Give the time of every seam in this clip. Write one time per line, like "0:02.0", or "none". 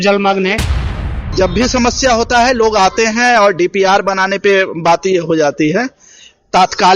0:01.2